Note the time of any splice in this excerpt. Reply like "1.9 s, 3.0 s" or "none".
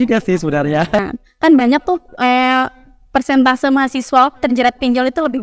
1.0 s